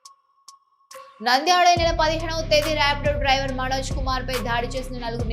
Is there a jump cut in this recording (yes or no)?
yes